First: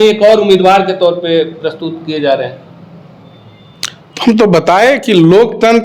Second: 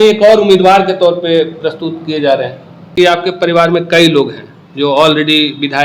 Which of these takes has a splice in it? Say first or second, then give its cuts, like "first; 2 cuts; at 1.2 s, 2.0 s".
second; 1 cut; at 2.9 s